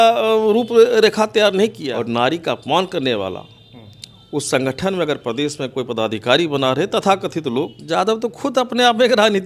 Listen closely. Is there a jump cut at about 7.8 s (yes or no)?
yes